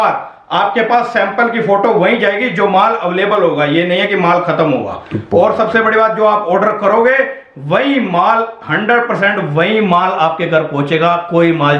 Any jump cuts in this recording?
no; 0 cuts

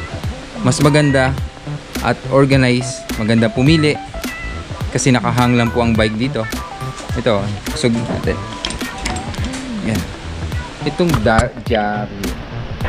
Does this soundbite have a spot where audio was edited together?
no; 0 cuts

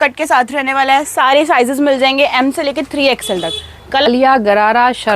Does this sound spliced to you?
yes; 1 cut; at 4.1 s

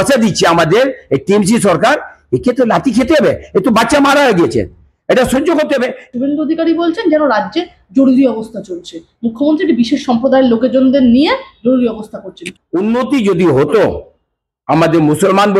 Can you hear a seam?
yes; 2 cuts; at 6.0 s, 12.5 s

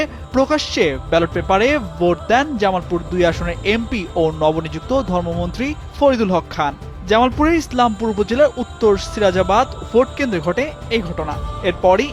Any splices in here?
no; 0 cuts

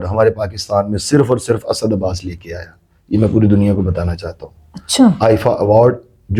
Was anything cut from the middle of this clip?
no; 0 cuts

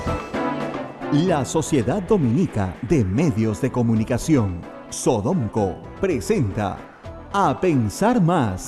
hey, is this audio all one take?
no; 1 cut; at 0.9 s

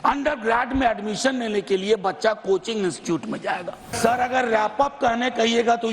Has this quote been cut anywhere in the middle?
yes; 1 cut; at 3.9 s

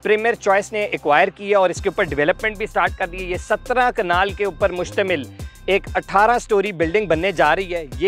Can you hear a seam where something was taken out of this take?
no; 0 cuts

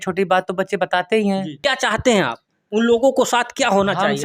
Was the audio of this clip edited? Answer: yes; 1 cut; at 1.5 s

